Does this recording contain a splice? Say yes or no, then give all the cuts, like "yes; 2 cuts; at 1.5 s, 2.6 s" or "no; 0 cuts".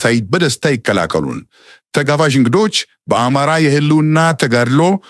no; 0 cuts